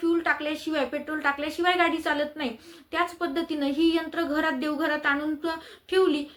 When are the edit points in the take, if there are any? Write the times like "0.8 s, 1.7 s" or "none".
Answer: none

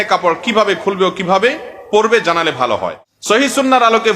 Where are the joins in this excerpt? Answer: 3.1 s

